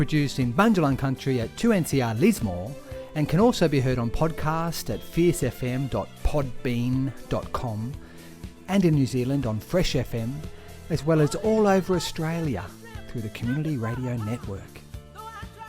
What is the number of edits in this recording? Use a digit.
1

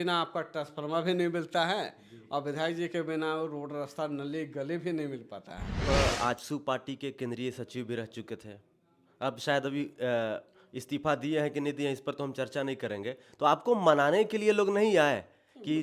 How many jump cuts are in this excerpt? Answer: 1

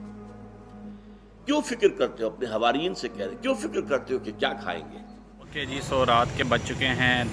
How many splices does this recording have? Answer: 1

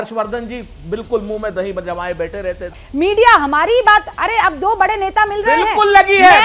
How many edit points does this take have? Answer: 1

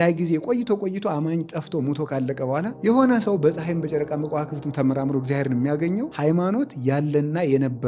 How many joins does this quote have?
2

